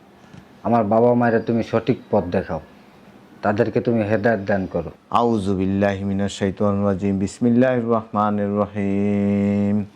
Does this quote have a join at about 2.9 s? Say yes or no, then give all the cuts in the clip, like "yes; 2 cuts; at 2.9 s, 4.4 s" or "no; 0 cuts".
no; 1 cut; at 5.0 s